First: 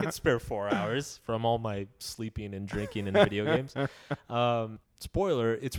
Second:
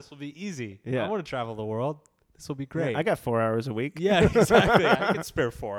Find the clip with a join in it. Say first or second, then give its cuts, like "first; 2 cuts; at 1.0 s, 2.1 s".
first; 1 cut; at 4.8 s